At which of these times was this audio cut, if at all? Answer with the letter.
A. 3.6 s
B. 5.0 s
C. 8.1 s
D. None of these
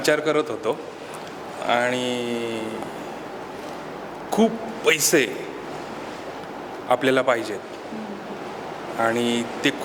D